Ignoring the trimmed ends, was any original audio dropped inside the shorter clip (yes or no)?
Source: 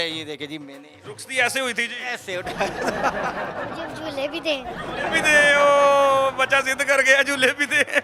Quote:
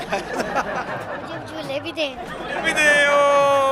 no